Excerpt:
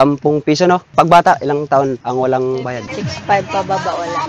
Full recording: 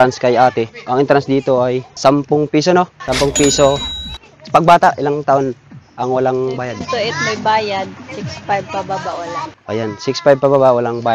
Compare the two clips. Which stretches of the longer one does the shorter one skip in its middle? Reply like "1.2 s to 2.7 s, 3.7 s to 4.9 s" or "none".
2.9 s to 4.4 s, 5.6 s to 5.9 s, 6.8 s to 8.0 s